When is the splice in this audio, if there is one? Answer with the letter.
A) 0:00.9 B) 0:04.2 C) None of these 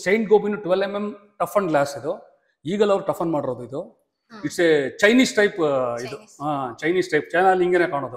B